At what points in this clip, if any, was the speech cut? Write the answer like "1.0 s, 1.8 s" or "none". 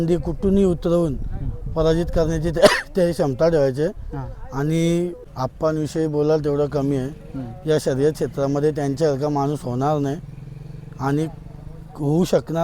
5.2 s